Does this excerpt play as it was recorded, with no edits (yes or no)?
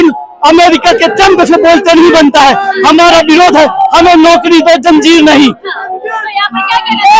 yes